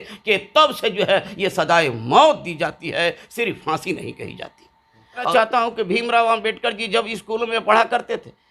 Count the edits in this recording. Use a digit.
1